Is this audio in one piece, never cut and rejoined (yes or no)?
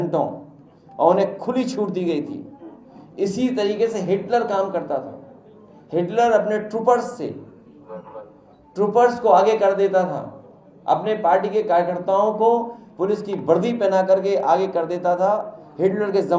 yes